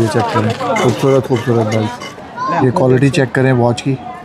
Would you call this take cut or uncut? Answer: cut